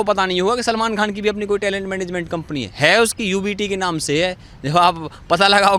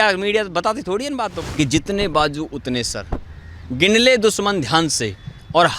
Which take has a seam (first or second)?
second